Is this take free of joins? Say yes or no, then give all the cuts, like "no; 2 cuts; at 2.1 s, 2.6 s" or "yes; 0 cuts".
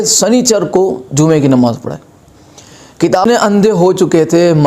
no; 1 cut; at 3.2 s